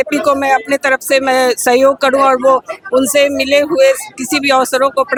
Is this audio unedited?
yes; 0 cuts

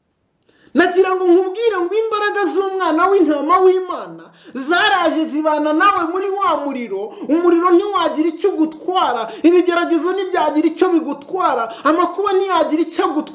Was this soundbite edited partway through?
no; 0 cuts

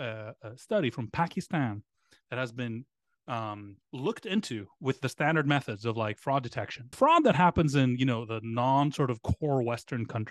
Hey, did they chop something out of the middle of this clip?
yes; 1 cut; at 6.8 s

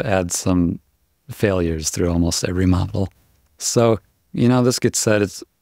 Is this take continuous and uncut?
yes; 0 cuts

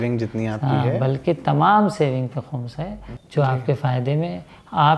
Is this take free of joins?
no; 1 cut; at 3.1 s

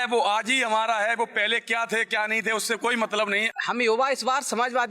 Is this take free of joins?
no; 1 cut; at 3.5 s

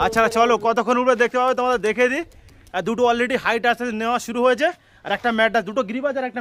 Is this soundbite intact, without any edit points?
yes; 0 cuts

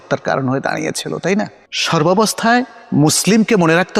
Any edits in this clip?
no; 0 cuts

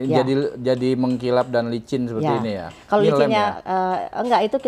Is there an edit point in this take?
no; 0 cuts

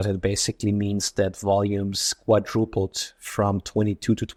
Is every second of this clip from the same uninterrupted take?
yes; 0 cuts

